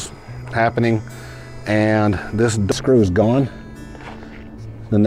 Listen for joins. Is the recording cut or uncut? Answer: cut